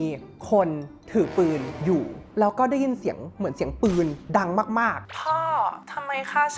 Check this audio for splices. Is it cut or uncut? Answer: cut